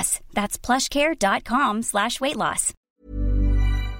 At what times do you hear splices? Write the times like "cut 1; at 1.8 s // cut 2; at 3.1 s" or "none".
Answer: cut 1; at 2.7 s